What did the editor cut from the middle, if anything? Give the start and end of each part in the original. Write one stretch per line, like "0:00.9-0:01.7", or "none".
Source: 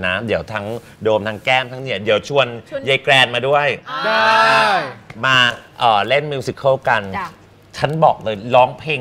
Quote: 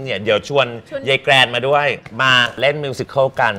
0:04.3-0:06.0